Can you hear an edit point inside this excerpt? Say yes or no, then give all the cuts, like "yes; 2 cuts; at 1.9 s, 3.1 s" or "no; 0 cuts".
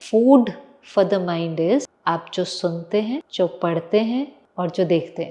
yes; 3 cuts; at 1.9 s, 3.3 s, 4.4 s